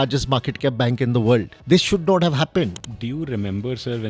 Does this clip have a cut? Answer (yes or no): yes